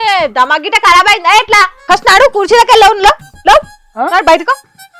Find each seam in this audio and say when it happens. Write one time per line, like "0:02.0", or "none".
0:01.8